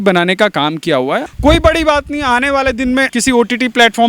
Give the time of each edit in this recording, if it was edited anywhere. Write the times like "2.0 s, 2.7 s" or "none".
1.3 s, 3.1 s

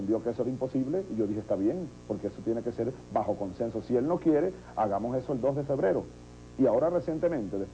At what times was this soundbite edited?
2.1 s

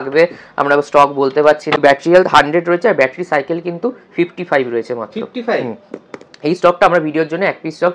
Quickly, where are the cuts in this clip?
1.8 s

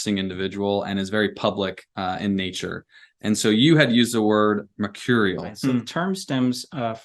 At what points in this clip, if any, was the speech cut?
5.8 s

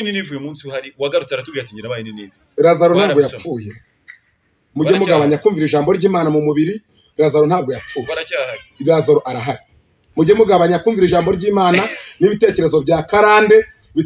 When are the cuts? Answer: none

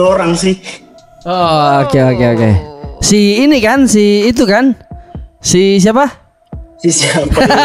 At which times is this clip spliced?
none

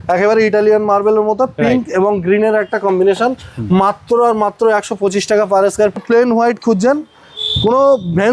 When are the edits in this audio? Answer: 6.0 s

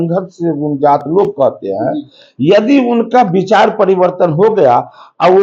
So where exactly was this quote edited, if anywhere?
none

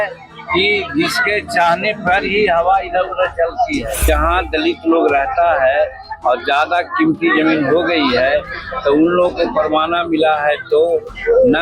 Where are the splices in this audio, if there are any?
4.0 s

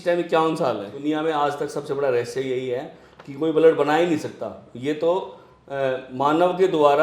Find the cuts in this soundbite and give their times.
0.9 s

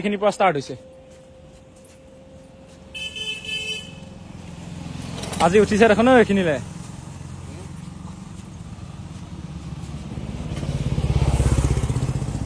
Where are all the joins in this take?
none

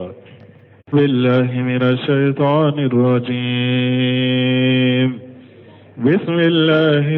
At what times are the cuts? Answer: 0.9 s

